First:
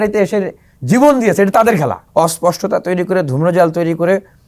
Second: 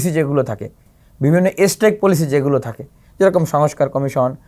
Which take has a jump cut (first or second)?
first